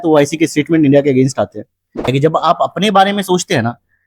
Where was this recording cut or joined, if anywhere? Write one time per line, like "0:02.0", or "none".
0:02.1